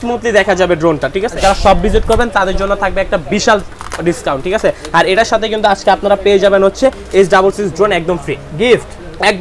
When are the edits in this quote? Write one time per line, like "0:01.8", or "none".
0:01.3